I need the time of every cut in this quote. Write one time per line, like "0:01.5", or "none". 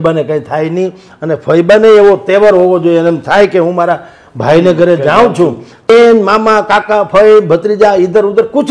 0:05.9